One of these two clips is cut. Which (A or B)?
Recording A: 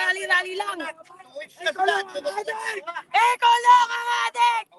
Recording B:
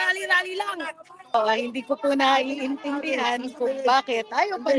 B